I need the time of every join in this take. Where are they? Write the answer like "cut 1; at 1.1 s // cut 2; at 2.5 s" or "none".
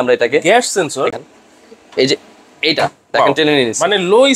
cut 1; at 1.1 s